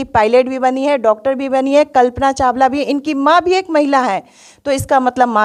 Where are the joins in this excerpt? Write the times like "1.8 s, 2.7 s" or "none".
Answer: none